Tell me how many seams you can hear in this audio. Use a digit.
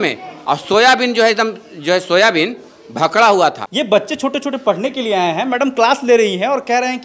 1